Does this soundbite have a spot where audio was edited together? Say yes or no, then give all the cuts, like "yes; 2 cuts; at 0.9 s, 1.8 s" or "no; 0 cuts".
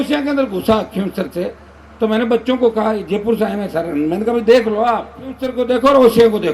yes; 1 cut; at 5.5 s